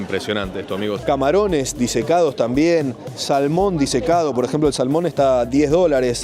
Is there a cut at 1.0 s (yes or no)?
yes